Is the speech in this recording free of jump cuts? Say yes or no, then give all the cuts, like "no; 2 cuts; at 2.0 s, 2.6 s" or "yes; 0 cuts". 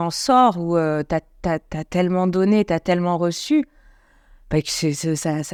yes; 0 cuts